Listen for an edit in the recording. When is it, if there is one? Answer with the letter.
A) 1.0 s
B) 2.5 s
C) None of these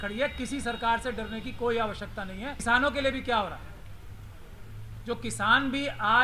B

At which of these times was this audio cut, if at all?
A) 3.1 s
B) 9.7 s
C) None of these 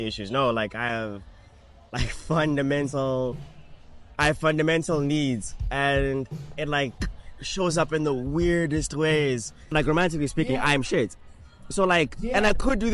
B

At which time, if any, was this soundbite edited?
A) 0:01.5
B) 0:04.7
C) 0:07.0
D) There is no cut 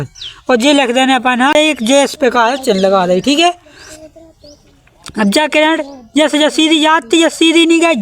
A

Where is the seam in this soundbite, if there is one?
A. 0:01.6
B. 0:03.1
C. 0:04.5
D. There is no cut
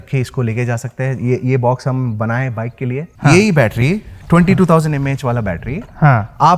B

